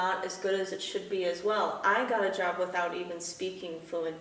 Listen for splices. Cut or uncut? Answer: uncut